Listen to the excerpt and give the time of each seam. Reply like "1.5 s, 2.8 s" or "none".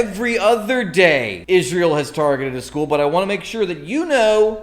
1.3 s